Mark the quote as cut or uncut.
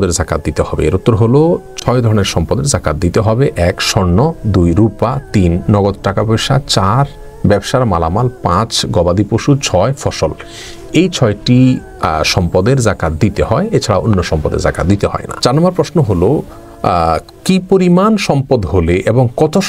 uncut